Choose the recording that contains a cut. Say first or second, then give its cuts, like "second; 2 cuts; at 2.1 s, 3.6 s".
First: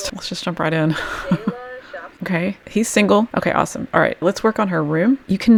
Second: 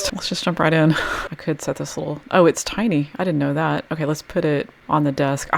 second; 1 cut; at 1.2 s